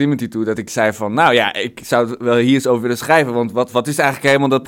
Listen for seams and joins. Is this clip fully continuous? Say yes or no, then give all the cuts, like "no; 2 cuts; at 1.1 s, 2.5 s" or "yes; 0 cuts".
yes; 0 cuts